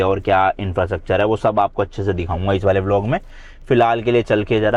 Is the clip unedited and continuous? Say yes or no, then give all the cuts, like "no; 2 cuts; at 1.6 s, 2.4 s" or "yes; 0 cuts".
yes; 0 cuts